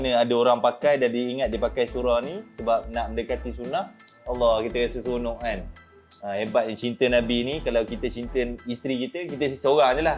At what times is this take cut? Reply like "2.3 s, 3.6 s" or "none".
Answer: none